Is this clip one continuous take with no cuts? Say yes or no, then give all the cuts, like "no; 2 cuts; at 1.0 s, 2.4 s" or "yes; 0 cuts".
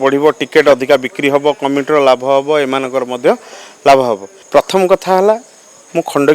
no; 1 cut; at 4.3 s